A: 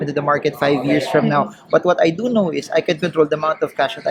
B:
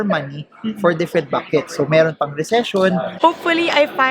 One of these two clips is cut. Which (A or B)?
B